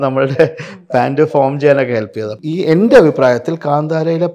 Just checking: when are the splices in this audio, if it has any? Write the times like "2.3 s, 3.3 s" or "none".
2.4 s